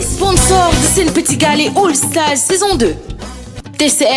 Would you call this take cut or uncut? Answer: uncut